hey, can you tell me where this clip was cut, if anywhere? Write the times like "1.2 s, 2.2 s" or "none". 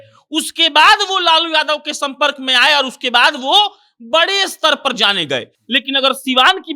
none